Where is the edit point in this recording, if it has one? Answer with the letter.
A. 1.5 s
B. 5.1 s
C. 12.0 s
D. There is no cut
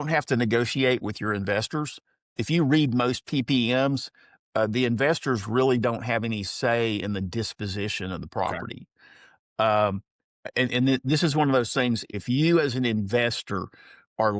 C